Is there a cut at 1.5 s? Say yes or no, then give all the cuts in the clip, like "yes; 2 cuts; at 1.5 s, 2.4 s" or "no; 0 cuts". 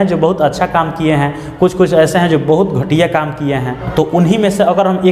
no; 1 cut; at 3.8 s